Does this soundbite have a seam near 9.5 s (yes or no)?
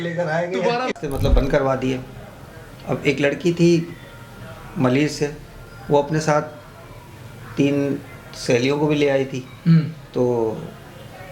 no